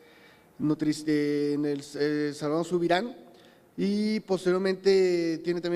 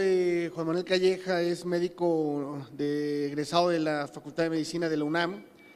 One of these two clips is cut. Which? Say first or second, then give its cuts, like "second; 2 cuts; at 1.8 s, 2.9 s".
second; 1 cut; at 4.8 s